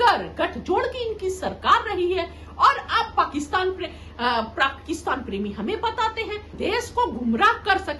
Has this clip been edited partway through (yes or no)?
yes